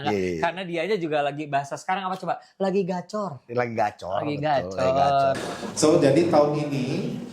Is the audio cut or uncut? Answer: cut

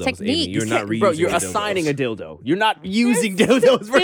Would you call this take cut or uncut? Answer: uncut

